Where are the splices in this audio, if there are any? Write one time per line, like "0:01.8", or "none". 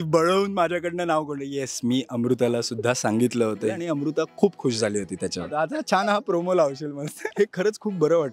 0:03.7
0:05.5
0:07.2